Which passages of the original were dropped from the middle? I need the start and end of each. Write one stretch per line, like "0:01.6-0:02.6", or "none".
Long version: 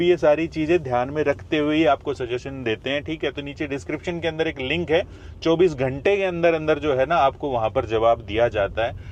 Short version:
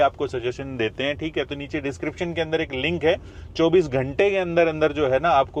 none